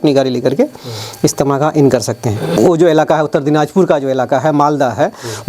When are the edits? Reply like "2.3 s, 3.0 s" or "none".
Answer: 2.5 s